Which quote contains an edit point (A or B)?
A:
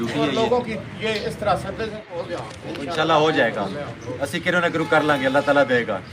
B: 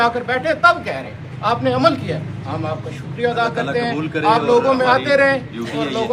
A